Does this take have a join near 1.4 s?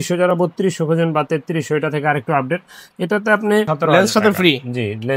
no; 1 cut; at 3.7 s

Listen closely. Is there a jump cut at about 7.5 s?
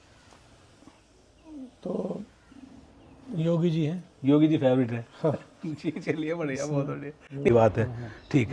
yes; 1 cut; at 7.5 s

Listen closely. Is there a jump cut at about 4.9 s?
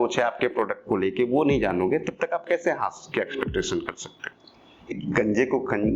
yes; 1 cut; at 4.9 s

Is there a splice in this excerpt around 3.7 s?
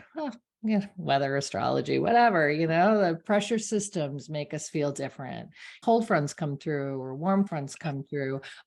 no; 2 cuts; at 5.7 s, 7.5 s

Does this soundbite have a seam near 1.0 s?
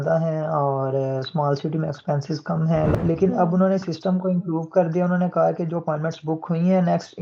no; 1 cut; at 2.9 s

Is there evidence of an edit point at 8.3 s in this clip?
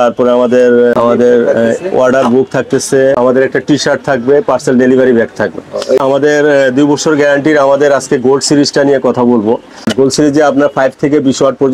no; 4 cuts; at 0.9 s, 3.2 s, 6.0 s, 9.9 s

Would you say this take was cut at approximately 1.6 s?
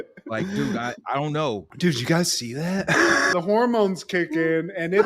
no; 1 cut; at 3.3 s

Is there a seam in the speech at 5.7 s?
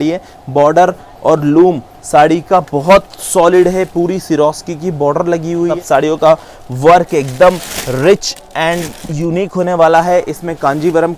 yes; 1 cut; at 5.7 s

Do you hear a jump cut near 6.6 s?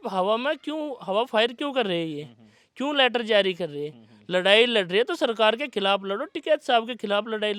no; 0 cuts

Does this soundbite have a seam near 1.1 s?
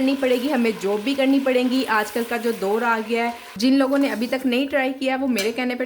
no; 1 cut; at 3.6 s

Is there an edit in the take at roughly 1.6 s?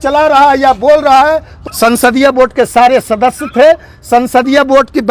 yes; 1 cut; at 1.6 s

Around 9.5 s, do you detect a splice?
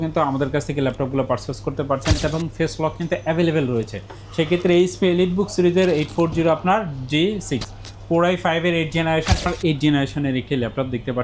yes; 2 cuts; at 2.2 s, 9.5 s

